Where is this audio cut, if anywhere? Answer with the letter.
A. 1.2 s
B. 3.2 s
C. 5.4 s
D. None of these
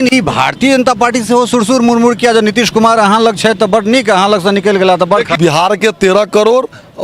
C